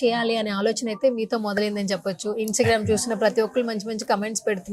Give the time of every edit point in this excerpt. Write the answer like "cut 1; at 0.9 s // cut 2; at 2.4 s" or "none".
none